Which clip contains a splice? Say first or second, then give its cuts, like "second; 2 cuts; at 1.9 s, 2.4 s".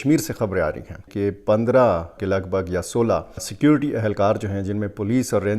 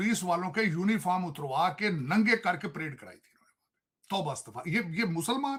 first; 1 cut; at 1.0 s